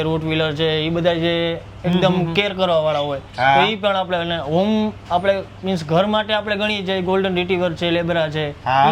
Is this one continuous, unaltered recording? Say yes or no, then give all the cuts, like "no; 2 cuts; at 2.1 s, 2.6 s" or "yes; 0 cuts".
yes; 0 cuts